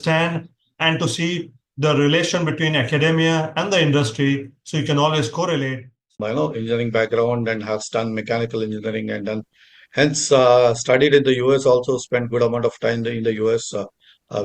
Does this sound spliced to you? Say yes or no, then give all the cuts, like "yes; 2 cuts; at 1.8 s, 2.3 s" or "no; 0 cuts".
yes; 1 cut; at 6.1 s